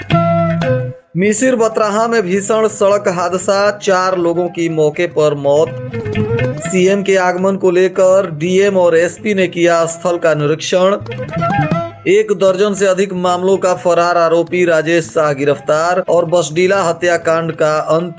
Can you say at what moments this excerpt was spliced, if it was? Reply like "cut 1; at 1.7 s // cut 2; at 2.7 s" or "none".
cut 1; at 1.1 s